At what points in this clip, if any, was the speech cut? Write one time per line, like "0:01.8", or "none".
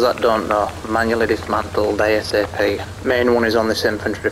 0:02.9

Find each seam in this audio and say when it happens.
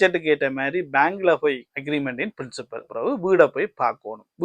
0:01.7
0:02.9

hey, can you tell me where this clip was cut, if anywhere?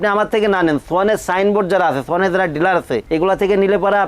0:03.0

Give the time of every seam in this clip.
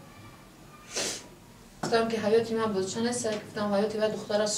0:01.9

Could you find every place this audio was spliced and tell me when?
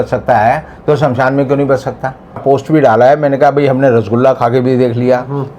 0:02.4

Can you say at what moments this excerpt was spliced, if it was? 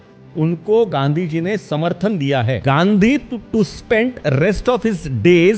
0:02.6

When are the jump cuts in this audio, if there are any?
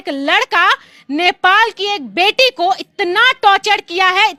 none

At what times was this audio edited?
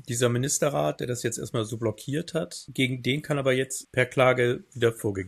none

